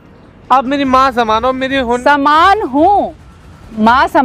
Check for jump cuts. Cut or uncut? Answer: uncut